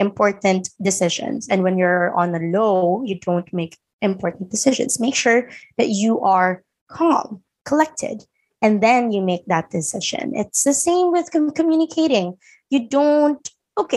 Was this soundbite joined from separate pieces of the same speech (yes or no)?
no